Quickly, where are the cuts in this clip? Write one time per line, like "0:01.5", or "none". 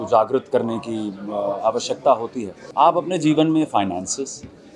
0:02.6